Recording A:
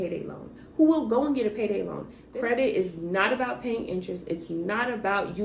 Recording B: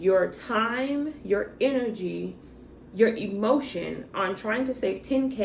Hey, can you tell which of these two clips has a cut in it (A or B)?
A